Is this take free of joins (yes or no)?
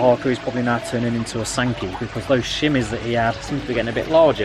yes